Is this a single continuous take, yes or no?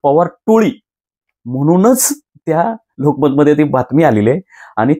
yes